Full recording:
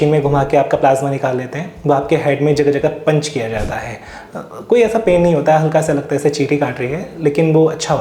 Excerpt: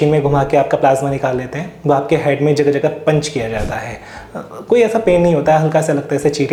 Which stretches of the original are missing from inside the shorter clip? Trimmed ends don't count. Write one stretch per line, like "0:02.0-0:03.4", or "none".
none